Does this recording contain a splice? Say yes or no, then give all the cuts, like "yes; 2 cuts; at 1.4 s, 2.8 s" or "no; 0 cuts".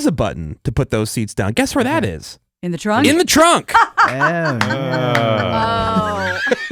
no; 0 cuts